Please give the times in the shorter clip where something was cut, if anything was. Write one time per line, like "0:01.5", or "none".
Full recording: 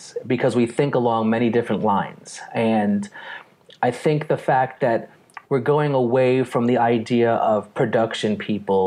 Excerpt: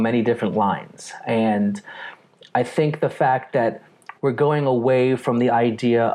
none